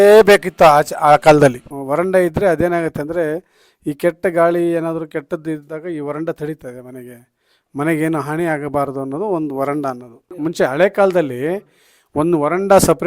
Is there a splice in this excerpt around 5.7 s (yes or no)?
no